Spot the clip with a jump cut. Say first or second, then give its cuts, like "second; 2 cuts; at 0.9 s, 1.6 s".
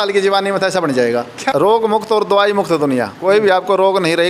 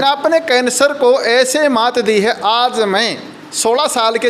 first; 2 cuts; at 1.3 s, 3.1 s